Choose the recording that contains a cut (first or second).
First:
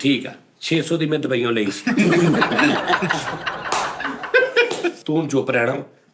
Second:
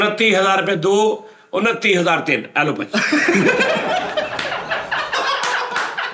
first